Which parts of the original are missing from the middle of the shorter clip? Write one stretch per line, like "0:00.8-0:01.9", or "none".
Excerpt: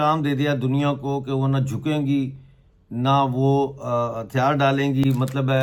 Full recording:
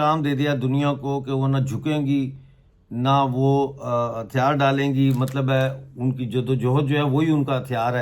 none